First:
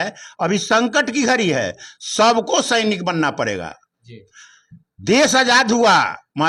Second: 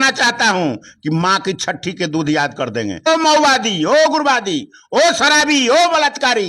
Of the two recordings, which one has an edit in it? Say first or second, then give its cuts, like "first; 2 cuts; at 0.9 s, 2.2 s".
second; 1 cut; at 3.1 s